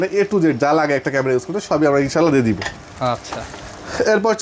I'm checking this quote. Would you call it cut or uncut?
uncut